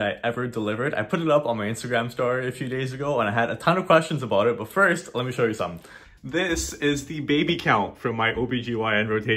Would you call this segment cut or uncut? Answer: uncut